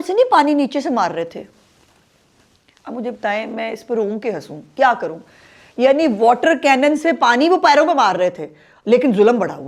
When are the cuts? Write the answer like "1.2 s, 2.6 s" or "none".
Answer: none